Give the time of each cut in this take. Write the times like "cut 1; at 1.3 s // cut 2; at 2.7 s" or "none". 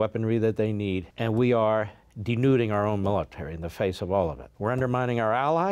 cut 1; at 1.1 s // cut 2; at 4.5 s